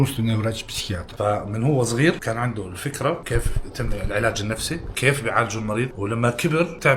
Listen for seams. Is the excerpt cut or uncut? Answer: cut